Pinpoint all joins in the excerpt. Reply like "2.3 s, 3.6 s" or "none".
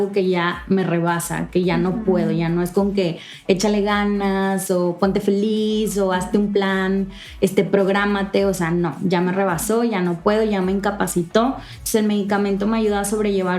none